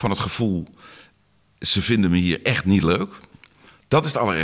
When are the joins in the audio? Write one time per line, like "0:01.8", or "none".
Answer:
none